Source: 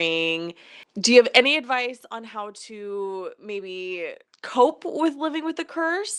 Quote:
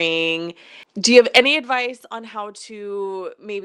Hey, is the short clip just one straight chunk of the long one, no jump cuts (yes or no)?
yes